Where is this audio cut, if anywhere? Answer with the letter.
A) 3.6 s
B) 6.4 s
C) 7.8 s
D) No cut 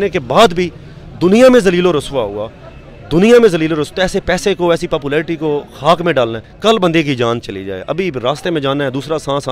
B